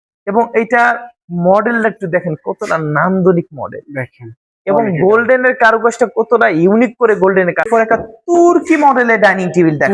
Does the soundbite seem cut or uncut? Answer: cut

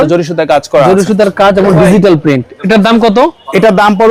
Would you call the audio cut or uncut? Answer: uncut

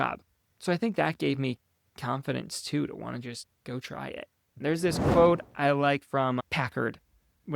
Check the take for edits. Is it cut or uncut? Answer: cut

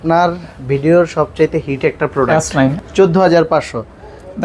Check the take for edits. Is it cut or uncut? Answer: cut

